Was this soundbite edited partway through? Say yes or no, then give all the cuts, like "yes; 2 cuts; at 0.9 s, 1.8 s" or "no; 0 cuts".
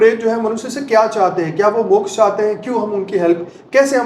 no; 0 cuts